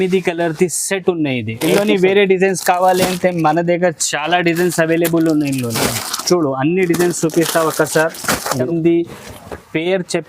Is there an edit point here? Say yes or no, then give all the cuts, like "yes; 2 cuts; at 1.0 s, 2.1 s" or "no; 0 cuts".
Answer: yes; 2 cuts; at 1.6 s, 8.7 s